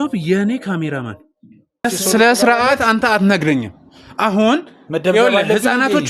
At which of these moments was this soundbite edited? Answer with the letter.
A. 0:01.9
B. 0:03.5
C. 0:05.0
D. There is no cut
A